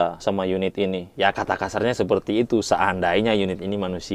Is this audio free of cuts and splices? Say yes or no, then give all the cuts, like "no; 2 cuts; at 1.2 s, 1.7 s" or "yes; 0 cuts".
no; 1 cut; at 1.1 s